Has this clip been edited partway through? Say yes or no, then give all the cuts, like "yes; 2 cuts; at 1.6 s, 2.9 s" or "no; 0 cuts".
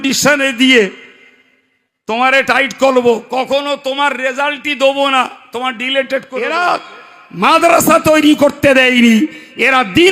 yes; 1 cut; at 6.5 s